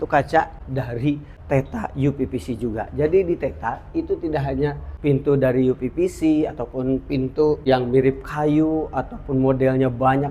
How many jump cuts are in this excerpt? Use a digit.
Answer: 3